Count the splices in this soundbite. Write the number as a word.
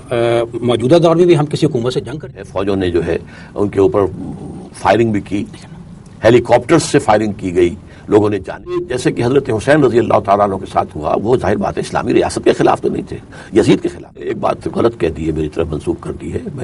three